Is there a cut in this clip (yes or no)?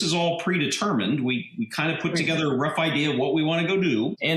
no